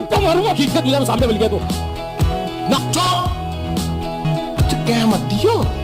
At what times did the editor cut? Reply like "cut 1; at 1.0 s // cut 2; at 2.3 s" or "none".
cut 1; at 2.8 s // cut 2; at 4.2 s